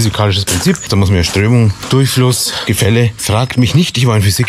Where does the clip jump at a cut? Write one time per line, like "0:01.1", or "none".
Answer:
0:00.9
0:01.8
0:02.8